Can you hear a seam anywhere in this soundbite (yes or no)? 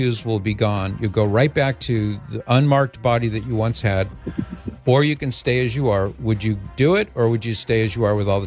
no